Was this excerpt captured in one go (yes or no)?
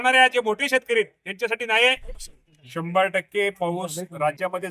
no